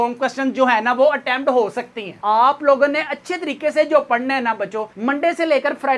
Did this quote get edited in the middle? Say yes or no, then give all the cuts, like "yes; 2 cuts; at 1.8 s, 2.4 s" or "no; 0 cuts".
yes; 1 cut; at 2.1 s